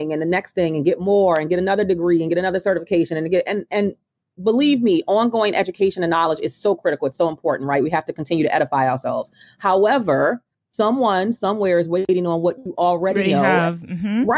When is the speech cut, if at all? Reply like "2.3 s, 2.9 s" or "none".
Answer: none